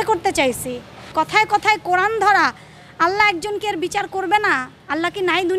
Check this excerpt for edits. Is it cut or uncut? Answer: cut